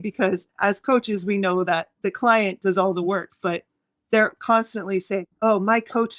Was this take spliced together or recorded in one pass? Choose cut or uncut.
cut